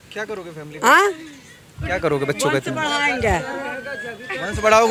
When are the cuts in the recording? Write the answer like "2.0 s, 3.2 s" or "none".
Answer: none